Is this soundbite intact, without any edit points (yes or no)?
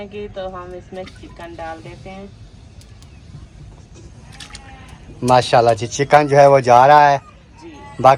yes